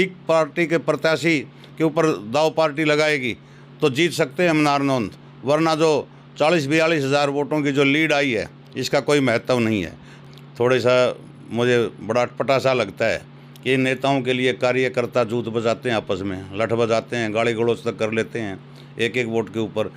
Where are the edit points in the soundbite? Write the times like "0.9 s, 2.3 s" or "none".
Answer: 10.1 s

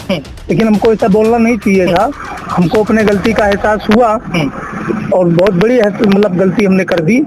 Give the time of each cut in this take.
none

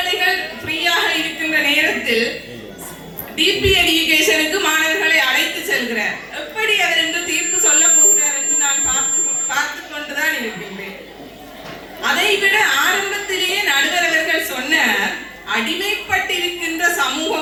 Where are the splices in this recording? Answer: none

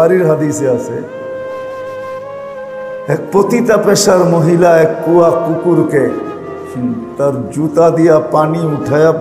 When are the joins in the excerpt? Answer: 1.3 s, 3.1 s

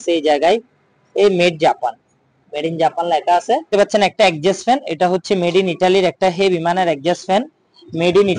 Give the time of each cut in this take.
3.7 s

